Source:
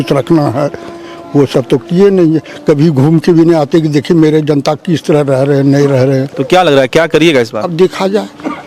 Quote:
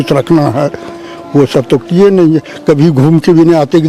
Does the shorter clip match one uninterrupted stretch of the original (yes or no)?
yes